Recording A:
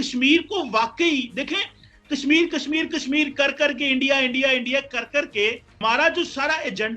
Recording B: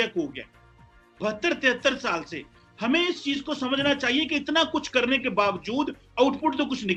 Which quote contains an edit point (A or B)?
A